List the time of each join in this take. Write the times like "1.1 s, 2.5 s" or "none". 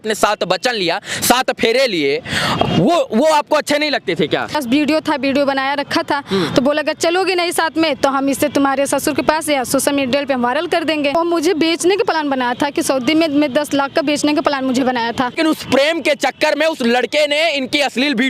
4.6 s, 11.1 s, 15.4 s